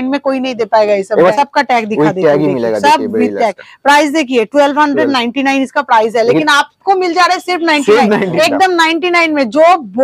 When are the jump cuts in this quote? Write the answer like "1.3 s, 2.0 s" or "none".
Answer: 1.3 s, 8.3 s

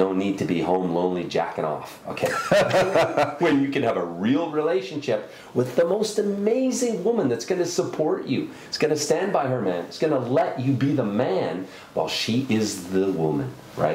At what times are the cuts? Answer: none

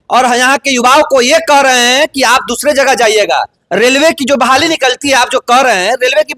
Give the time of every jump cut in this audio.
none

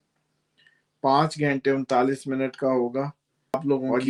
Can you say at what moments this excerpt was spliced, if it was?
none

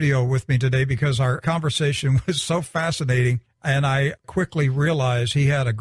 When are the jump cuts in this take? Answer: 2.7 s

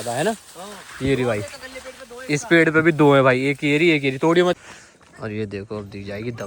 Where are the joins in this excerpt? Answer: 4.6 s

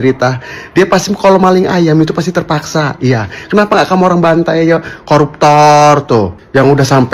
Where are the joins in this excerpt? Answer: none

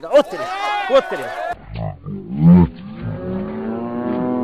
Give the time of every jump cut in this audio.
1.3 s

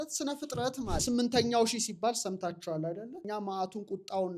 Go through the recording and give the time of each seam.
1.0 s, 3.2 s

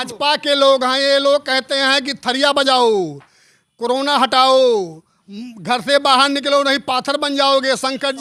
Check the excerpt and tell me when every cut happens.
none

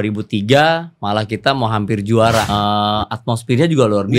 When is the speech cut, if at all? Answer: 2.5 s

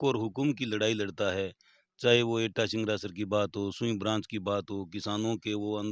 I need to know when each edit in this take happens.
none

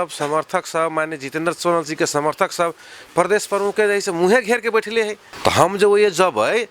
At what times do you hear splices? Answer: 5.2 s

